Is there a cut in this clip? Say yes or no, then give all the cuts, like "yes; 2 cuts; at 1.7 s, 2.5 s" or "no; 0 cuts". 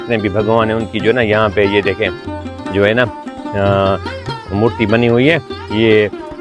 no; 0 cuts